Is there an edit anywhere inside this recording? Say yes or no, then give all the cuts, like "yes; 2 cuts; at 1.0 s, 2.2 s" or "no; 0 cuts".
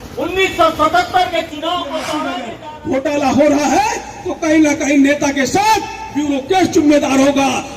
yes; 1 cut; at 2.6 s